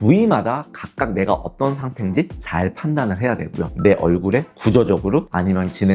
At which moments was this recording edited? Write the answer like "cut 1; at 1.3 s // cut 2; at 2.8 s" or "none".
cut 1; at 3.7 s